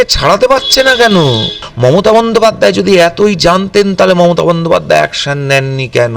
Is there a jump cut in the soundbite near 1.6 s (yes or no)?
yes